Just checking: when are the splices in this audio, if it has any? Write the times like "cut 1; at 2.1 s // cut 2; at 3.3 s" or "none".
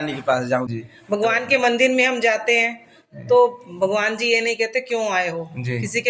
cut 1; at 1.0 s